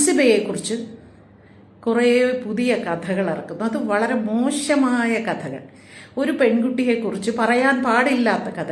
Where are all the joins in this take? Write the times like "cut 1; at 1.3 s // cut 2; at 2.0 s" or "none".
none

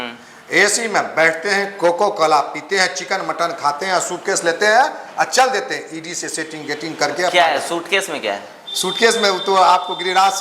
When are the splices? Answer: none

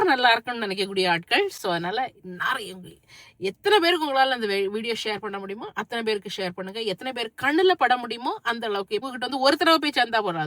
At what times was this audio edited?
cut 1; at 9.1 s

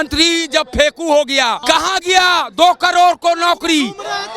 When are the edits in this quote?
cut 1; at 1.6 s

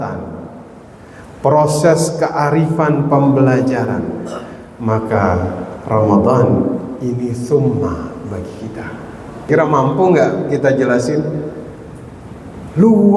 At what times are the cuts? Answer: cut 1; at 9.5 s

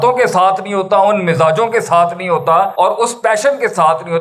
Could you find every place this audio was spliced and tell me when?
cut 1; at 2.7 s

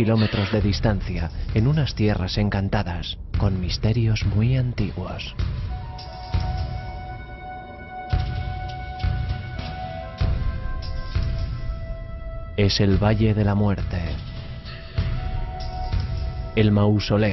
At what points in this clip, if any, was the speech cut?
none

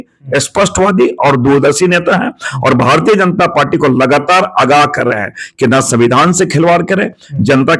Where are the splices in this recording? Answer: none

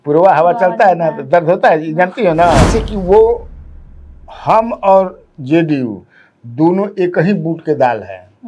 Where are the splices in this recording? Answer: cut 1; at 2.7 s

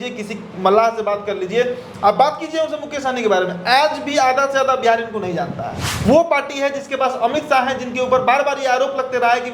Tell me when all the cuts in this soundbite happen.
cut 1; at 5.9 s

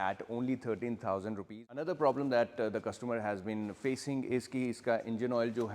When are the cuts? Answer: cut 1; at 1.7 s

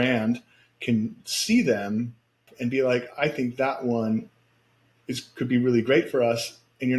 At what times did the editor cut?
cut 1; at 2.5 s

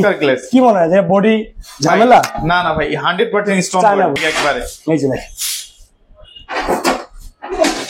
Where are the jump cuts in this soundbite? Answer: cut 1; at 4.2 s

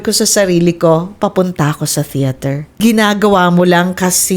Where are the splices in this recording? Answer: cut 1; at 2.8 s

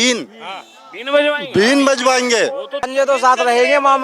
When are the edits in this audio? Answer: cut 1; at 2.9 s

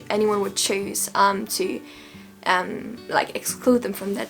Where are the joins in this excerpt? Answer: none

